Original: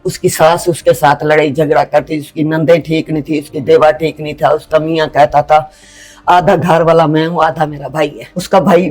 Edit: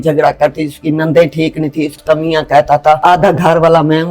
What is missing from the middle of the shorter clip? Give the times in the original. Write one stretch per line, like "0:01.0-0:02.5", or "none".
0:03.5-0:04.6
0:05.6-0:06.2

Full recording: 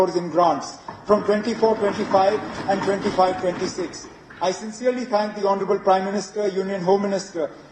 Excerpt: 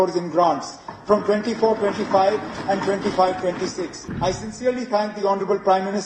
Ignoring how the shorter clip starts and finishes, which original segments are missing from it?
0:04.0-0:04.2

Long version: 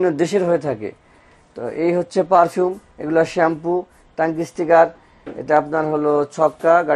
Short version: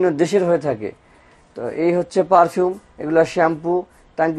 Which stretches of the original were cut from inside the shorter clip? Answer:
none

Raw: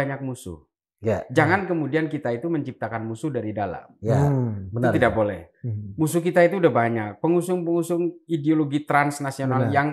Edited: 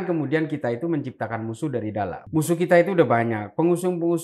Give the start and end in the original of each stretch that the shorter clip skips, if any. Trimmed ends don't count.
0:03.8-0:05.8

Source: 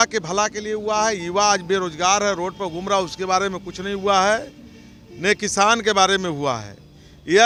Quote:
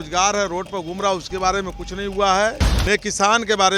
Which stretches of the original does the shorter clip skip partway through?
0:04.6-0:05.1

